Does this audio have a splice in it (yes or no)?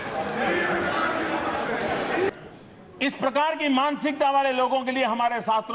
yes